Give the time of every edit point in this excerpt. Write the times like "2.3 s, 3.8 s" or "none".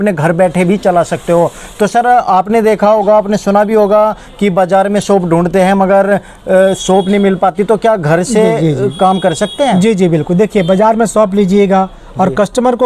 none